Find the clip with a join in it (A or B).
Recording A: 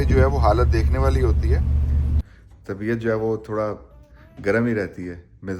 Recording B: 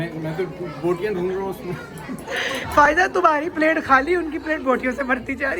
A